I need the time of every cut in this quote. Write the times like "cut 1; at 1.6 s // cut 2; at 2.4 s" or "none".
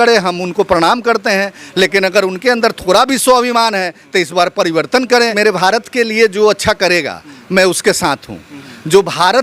cut 1; at 5.3 s